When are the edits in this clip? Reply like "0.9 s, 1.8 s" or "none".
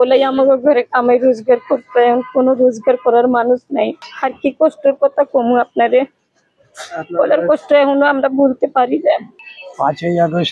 4.0 s, 9.3 s